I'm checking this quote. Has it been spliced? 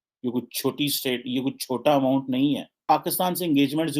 yes; 1 cut; at 2.7 s

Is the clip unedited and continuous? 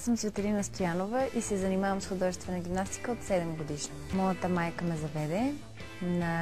no; 1 cut; at 3.9 s

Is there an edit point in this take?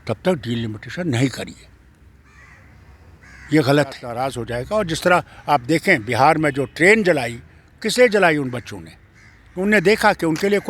yes; 1 cut; at 4.3 s

